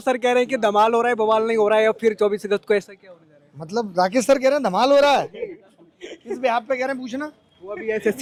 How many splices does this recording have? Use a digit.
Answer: 0